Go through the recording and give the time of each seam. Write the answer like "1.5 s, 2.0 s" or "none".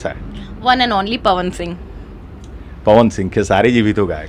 none